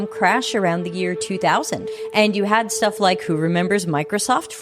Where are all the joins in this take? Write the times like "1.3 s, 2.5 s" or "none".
1.9 s